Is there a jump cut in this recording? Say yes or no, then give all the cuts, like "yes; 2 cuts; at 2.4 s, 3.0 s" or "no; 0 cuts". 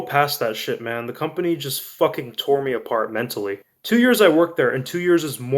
yes; 1 cut; at 3.7 s